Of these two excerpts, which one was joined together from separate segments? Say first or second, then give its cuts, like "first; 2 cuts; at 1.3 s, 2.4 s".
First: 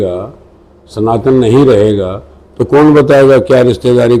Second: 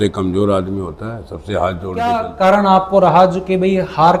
second; 1 cut; at 2.3 s